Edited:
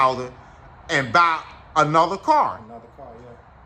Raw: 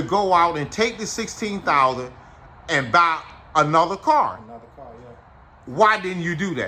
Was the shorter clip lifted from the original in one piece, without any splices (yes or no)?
yes